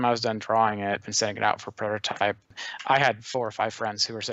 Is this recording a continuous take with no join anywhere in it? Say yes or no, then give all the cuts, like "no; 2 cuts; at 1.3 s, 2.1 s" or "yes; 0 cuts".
no; 2 cuts; at 1.1 s, 2.6 s